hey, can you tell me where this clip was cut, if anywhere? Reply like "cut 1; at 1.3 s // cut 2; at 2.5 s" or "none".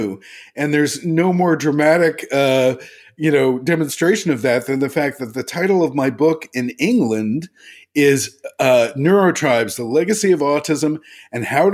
none